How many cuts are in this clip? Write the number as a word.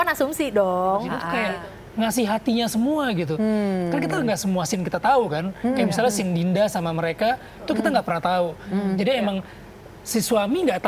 one